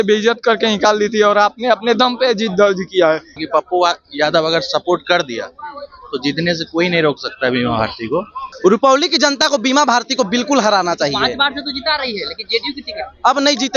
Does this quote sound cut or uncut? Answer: cut